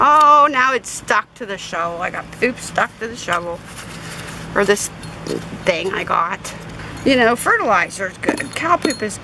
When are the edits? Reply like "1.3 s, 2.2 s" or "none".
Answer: none